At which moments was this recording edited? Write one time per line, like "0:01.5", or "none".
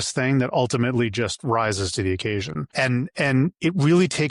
0:02.6

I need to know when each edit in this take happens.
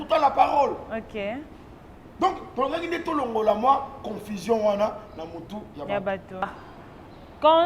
0:06.5

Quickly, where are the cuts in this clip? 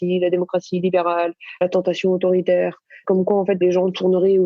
0:01.6
0:03.6

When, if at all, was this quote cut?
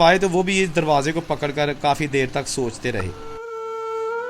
none

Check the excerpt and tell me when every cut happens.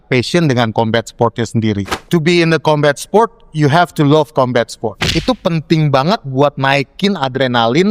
0:01.9
0:05.0

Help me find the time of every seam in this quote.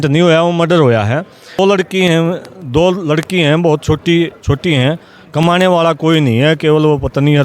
0:01.6

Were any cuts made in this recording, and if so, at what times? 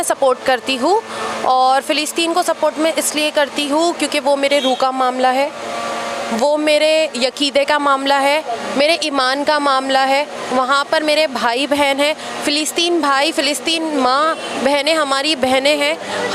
none

